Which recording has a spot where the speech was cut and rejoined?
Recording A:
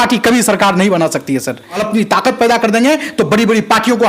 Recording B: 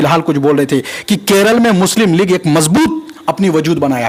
A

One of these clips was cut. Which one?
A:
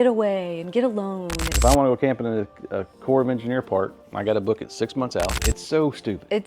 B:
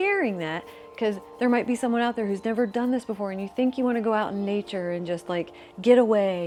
A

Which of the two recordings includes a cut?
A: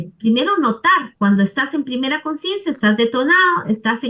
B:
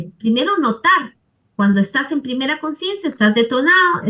A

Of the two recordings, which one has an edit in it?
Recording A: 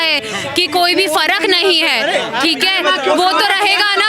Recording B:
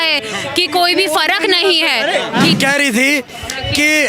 B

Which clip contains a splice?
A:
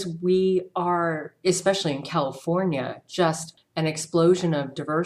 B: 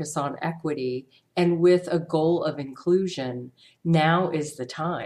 A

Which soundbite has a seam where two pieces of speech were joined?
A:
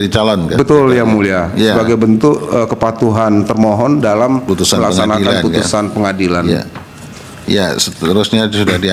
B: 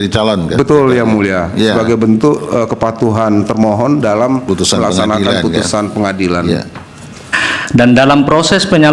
B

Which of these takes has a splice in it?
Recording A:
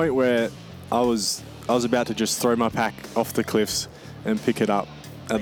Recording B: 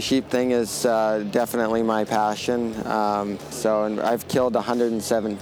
B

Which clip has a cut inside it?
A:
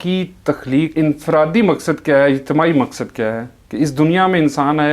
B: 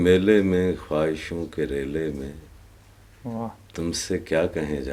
A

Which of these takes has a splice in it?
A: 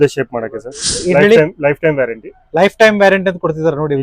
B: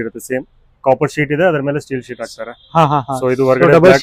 A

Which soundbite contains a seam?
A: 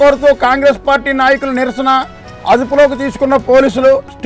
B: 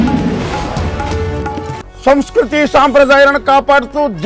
B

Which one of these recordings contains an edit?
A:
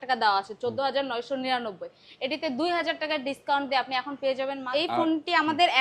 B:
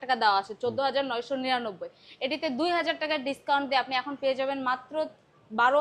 A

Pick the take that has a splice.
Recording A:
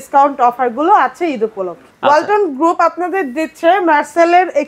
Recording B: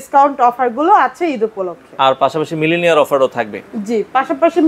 A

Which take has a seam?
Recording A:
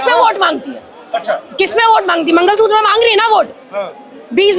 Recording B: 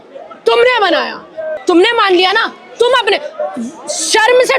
B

